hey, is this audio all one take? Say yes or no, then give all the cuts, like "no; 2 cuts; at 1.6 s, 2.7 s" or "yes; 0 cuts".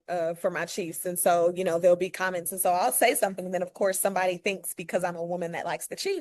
yes; 0 cuts